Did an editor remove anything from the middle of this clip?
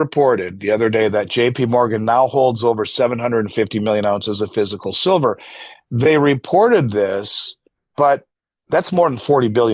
no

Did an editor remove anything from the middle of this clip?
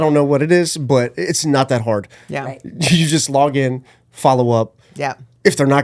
no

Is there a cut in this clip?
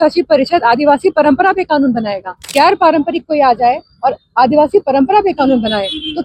yes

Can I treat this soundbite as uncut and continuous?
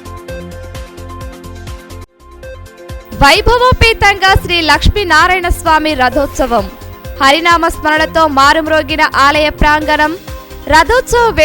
no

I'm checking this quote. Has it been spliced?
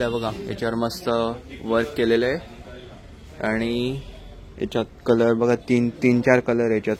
no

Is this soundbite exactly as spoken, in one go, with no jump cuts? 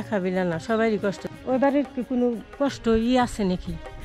no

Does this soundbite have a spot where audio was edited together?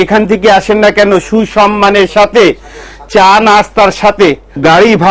no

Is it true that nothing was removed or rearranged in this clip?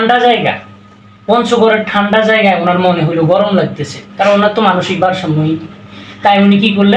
yes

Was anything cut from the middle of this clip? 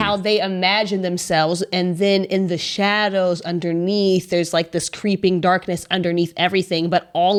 no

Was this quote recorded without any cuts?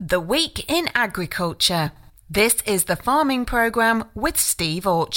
yes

